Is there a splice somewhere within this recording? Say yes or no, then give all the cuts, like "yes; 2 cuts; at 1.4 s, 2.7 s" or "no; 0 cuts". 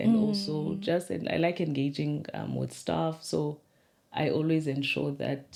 no; 0 cuts